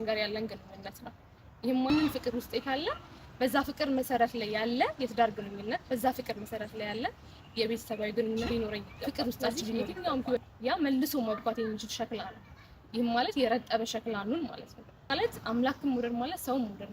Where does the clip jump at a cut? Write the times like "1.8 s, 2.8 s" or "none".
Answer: 1.9 s, 10.4 s, 15.1 s